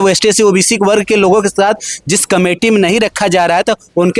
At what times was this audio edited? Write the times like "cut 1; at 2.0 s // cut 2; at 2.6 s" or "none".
none